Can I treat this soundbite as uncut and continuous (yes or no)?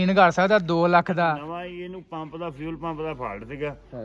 no